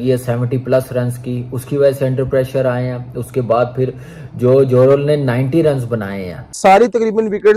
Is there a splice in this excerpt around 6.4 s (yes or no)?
yes